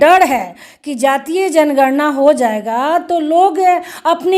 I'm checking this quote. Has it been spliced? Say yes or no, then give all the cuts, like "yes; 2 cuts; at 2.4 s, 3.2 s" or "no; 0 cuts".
no; 0 cuts